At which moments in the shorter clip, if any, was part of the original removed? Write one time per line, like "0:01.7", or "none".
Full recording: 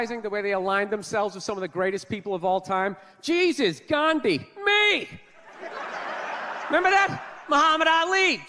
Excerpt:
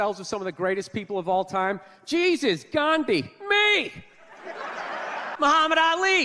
0:05.3